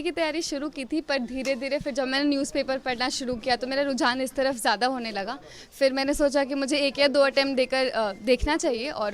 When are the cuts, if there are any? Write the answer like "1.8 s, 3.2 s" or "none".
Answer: none